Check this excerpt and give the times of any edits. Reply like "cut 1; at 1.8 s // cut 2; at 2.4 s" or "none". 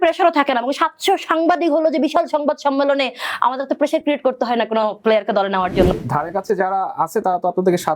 cut 1; at 6.0 s